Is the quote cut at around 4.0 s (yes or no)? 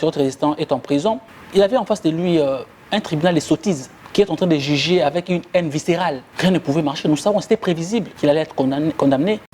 yes